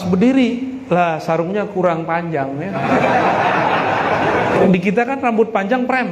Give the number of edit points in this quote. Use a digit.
1